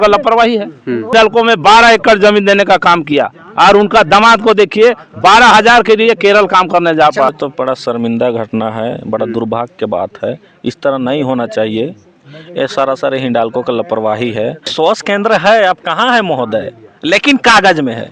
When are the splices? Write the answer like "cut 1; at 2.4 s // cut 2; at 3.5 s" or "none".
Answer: cut 1; at 1.1 s // cut 2; at 7.3 s // cut 3; at 14.7 s